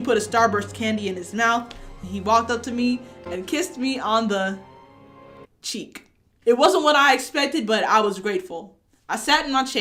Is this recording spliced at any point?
no; 0 cuts

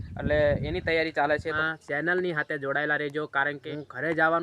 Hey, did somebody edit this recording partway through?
yes; 2 cuts; at 1.6 s, 3.6 s

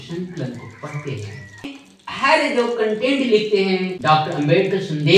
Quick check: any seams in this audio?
yes; 2 cuts; at 1.8 s, 3.9 s

